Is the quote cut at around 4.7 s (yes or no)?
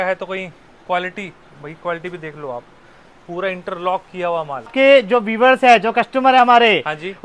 yes